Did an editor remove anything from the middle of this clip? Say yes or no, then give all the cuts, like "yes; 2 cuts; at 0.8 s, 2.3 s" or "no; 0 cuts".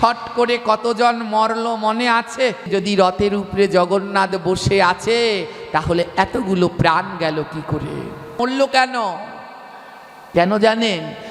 yes; 2 cuts; at 2.7 s, 8.4 s